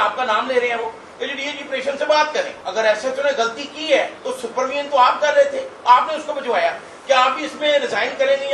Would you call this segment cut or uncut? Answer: cut